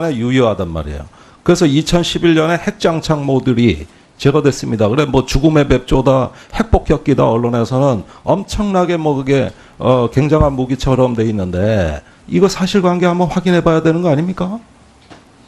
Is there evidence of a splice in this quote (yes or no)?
yes